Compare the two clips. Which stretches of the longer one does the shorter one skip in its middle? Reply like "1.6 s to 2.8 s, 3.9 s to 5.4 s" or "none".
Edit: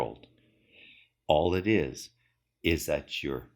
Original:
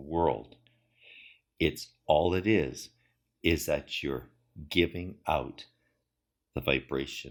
1.4 s to 1.9 s